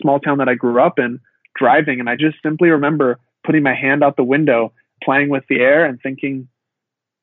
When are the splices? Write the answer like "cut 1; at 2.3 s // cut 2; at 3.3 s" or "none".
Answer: cut 1; at 2.2 s // cut 2; at 4.9 s